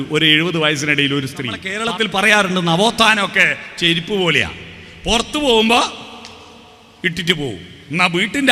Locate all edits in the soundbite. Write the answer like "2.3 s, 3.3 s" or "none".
1.6 s